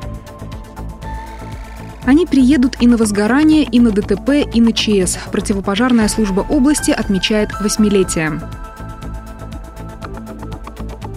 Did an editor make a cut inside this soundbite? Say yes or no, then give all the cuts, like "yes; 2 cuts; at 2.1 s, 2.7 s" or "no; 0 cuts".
no; 0 cuts